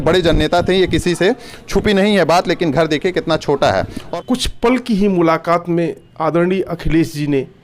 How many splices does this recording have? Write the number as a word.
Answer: one